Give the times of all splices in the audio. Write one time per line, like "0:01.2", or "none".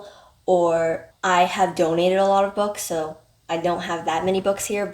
0:01.1